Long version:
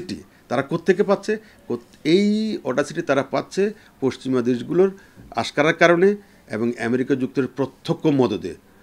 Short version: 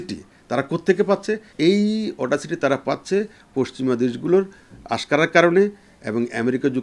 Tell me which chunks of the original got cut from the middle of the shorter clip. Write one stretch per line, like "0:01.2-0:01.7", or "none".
0:01.5-0:01.9